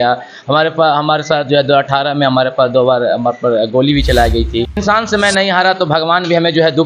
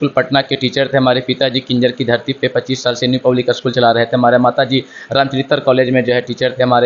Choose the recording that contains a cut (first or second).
first